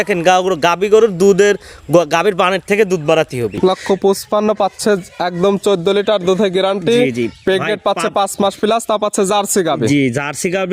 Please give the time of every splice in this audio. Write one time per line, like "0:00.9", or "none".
0:03.5